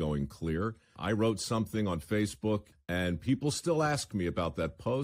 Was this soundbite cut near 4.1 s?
no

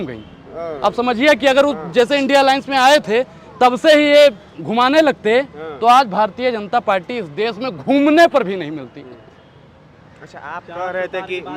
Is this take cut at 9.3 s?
no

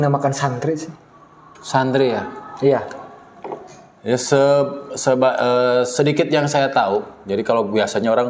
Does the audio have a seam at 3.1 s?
no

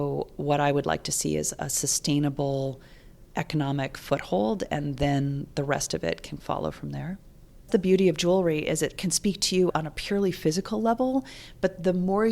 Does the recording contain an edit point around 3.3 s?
no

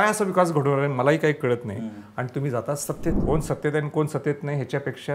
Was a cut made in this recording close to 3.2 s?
yes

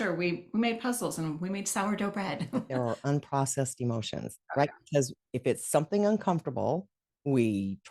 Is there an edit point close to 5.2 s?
yes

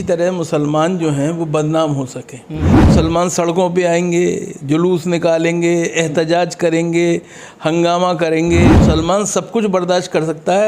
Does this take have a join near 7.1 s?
no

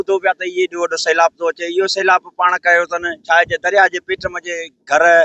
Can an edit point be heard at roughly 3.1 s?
no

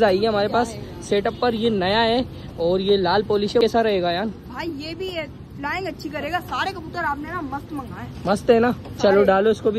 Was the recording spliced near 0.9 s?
no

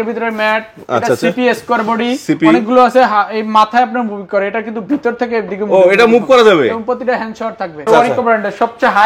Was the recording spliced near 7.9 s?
yes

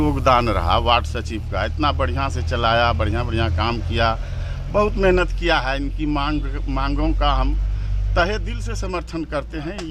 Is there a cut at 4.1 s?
no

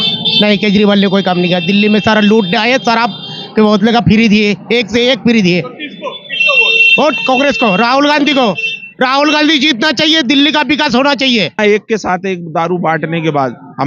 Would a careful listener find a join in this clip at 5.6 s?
no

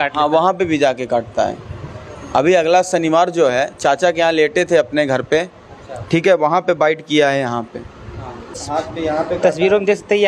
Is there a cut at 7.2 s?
no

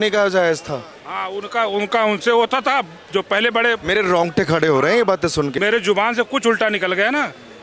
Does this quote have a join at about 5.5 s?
yes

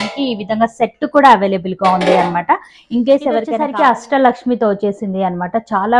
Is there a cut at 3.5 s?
yes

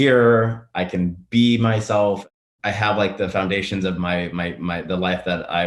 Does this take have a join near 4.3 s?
no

